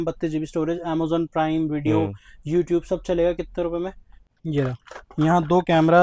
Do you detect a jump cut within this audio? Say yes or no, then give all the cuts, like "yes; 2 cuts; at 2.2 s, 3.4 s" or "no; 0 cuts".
yes; 1 cut; at 4.3 s